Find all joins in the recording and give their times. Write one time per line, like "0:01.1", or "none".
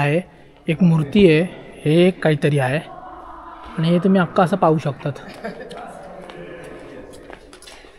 none